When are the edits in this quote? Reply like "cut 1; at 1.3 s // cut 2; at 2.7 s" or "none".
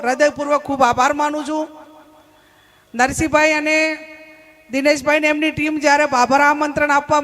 none

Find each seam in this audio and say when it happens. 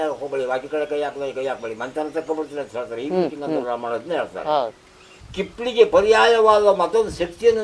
cut 1; at 5.2 s

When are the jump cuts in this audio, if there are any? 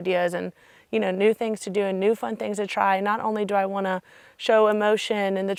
none

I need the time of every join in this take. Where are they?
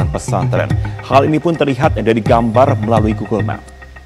none

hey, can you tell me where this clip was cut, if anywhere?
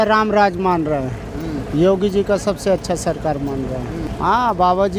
cut 1; at 4.1 s

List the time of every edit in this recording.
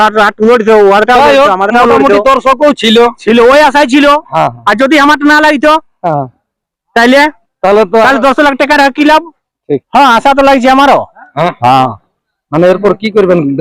cut 1; at 9.6 s

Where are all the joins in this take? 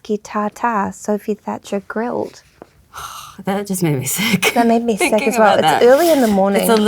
none

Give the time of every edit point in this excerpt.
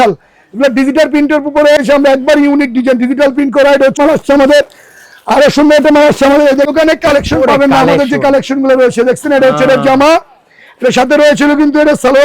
cut 1; at 1.8 s // cut 2; at 4.0 s // cut 3; at 6.7 s

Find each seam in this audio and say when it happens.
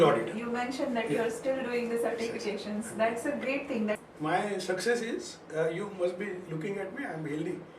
cut 1; at 4.0 s

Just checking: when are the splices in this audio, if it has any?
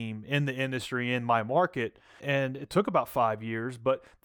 cut 1; at 2.2 s

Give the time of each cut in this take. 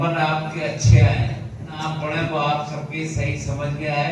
cut 1; at 1.7 s

